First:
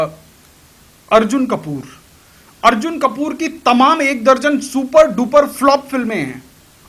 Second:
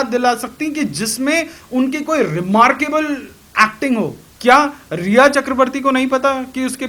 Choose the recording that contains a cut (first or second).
second